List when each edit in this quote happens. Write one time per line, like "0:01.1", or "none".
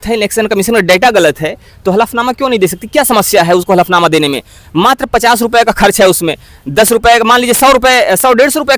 none